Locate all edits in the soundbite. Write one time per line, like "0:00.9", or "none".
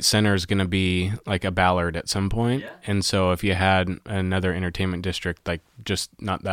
none